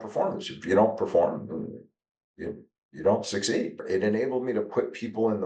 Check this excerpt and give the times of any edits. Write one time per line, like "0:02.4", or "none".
0:03.9